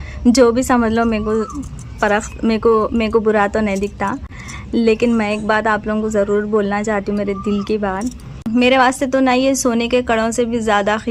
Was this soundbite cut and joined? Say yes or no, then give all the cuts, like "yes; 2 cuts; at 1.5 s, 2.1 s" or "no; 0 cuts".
no; 0 cuts